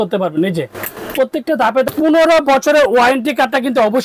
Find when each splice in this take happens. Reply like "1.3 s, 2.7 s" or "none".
1.9 s